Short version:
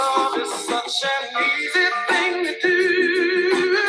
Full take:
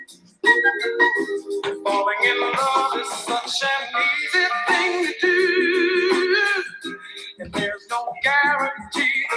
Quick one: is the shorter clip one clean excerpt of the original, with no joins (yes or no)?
yes